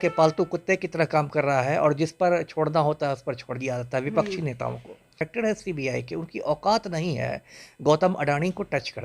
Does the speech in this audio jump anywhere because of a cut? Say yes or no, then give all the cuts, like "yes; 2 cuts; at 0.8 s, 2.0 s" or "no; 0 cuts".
yes; 1 cut; at 5.3 s